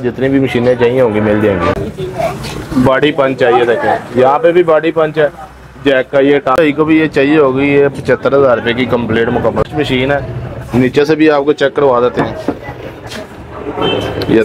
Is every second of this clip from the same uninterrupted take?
no; 3 cuts; at 1.8 s, 6.5 s, 9.7 s

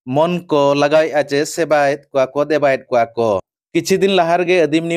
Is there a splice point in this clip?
yes; 1 cut; at 3.6 s

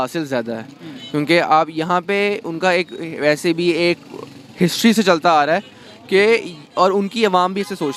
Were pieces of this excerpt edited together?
no; 0 cuts

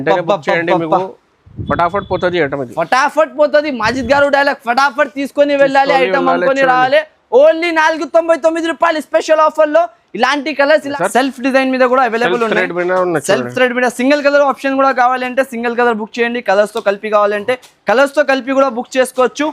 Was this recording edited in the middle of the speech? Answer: yes; 1 cut; at 10.9 s

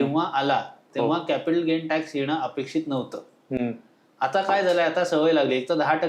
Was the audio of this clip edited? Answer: no; 0 cuts

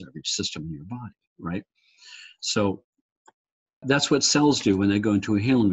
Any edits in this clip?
yes; 1 cut; at 3.8 s

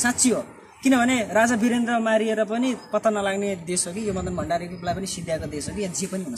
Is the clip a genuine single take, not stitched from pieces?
yes; 0 cuts

